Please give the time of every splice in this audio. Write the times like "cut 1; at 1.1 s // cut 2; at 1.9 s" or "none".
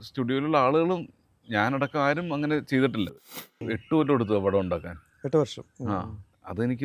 cut 1; at 3.2 s

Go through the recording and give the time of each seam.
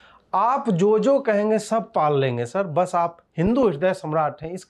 none

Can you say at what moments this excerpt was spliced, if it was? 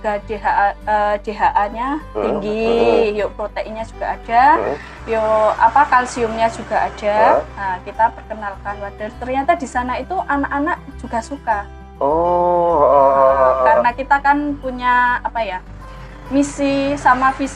none

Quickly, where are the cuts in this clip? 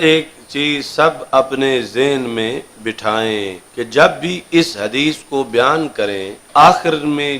cut 1; at 3.6 s // cut 2; at 6.4 s

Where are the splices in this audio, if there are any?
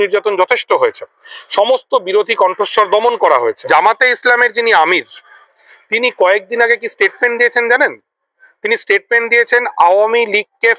cut 1; at 3.6 s

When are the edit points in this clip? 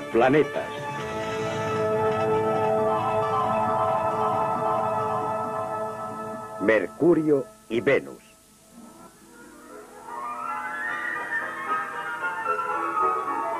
none

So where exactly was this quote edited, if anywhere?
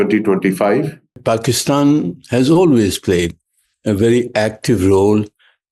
cut 1; at 1.2 s

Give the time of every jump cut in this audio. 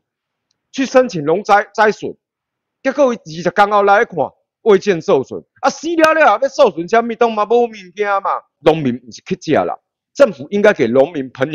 cut 1; at 8.5 s

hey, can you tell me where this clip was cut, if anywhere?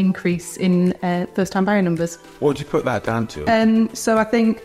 cut 1; at 2.2 s // cut 2; at 3.3 s

